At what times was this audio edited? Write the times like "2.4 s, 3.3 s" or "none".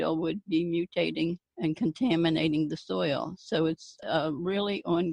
1.5 s, 4.0 s